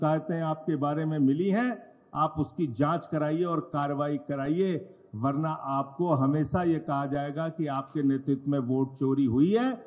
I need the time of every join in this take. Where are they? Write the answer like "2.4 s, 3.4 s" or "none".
none